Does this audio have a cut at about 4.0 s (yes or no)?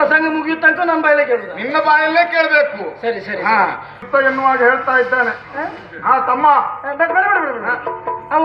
yes